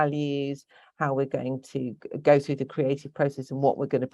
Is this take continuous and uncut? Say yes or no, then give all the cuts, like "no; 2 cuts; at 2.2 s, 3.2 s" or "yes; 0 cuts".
yes; 0 cuts